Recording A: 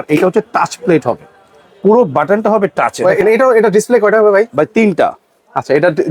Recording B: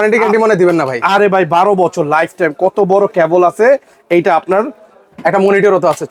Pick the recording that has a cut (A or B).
A